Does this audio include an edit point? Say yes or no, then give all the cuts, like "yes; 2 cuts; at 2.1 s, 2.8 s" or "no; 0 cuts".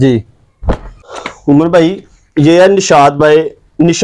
yes; 1 cut; at 0.9 s